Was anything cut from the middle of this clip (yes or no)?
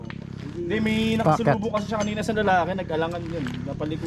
no